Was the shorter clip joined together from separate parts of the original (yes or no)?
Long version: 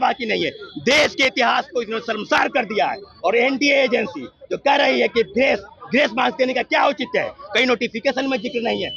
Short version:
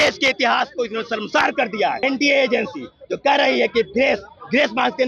yes